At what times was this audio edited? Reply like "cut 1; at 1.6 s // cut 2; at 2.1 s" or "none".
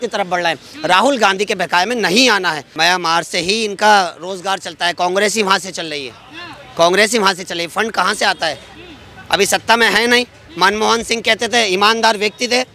cut 1; at 2.6 s